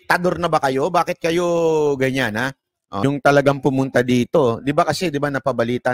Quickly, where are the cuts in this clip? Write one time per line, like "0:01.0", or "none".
0:03.0